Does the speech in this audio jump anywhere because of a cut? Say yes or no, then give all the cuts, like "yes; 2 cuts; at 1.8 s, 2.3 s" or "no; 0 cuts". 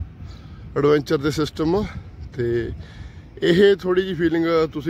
no; 0 cuts